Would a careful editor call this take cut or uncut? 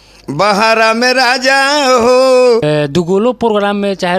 cut